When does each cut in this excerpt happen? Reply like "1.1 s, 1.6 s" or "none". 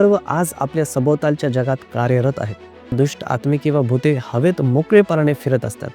2.9 s